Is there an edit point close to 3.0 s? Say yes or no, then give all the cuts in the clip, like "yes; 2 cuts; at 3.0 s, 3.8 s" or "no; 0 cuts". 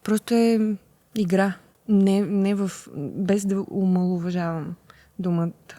no; 2 cuts; at 1.0 s, 1.7 s